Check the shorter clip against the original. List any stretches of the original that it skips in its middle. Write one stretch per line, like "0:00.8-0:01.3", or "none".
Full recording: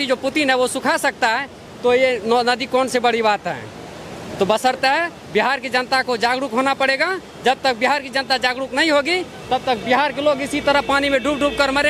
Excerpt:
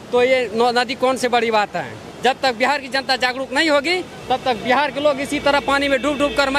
0:03.8-0:07.3

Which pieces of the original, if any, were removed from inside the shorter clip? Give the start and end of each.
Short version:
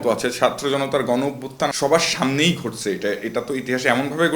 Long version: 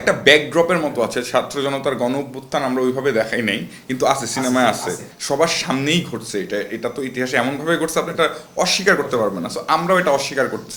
0:02.6-0:05.2

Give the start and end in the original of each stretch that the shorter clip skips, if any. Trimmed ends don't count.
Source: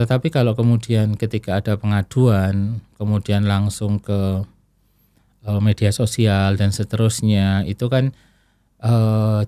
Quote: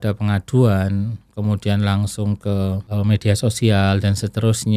0:04.5-0:05.4

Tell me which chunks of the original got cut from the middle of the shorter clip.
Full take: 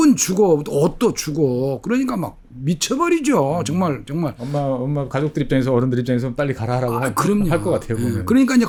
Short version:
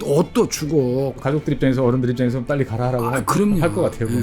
0:01.8-0:05.1

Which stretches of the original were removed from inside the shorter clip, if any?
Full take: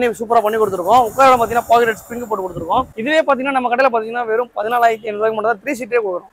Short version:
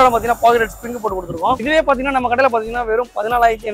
0:02.9-0:03.0

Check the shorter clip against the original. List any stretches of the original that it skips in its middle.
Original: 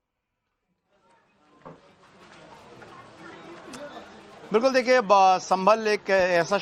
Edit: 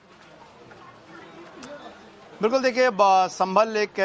none

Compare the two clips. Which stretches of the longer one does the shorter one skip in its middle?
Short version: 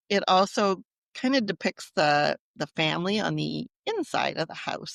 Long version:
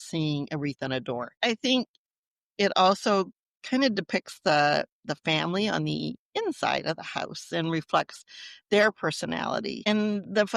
none

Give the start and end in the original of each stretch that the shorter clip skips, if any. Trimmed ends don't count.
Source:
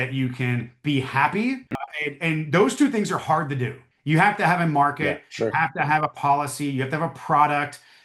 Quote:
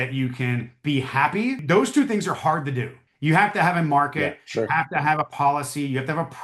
0:01.6-0:02.5

